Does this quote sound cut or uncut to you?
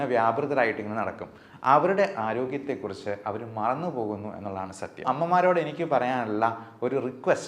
cut